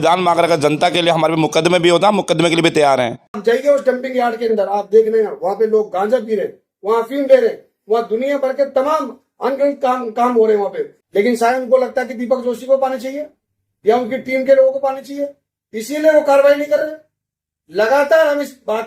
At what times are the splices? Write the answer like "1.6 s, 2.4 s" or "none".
3.3 s, 10.9 s